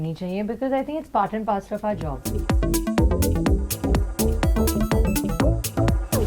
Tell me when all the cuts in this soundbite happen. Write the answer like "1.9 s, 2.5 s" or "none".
2.3 s